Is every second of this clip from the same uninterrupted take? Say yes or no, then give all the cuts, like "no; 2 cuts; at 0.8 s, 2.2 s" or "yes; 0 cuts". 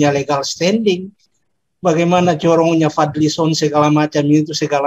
no; 1 cut; at 1.3 s